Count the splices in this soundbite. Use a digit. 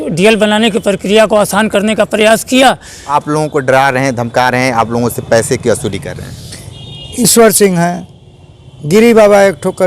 1